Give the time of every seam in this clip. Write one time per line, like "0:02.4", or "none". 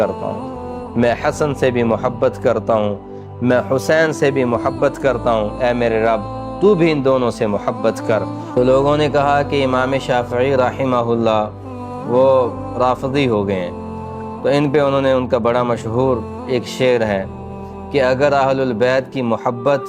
0:08.4